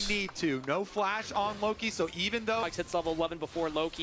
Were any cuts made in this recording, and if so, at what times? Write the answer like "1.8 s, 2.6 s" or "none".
2.6 s